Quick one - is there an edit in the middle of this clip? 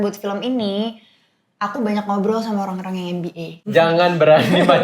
yes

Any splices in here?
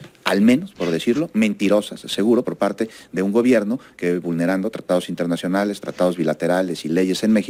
no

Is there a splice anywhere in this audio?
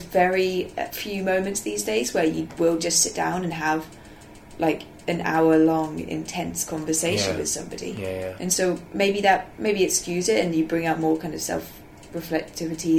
yes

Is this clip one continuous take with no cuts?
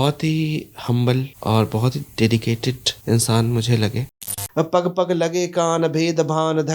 no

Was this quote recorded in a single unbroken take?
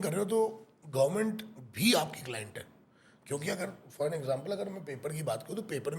yes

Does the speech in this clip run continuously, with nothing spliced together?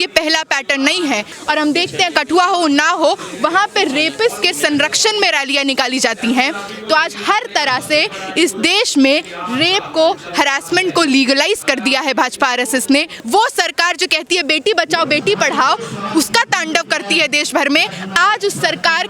no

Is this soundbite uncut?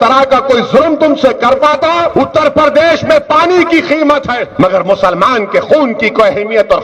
no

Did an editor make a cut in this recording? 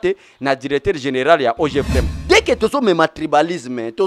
yes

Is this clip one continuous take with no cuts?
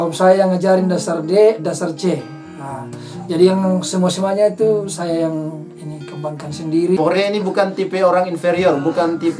no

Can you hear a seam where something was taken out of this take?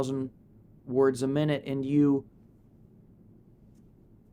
no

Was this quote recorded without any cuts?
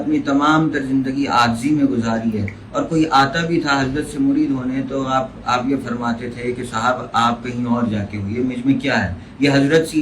yes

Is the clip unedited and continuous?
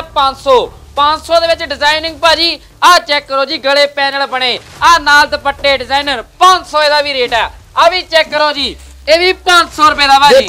yes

